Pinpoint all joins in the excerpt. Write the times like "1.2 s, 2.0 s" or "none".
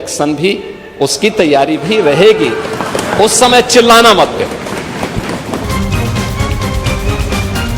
5.7 s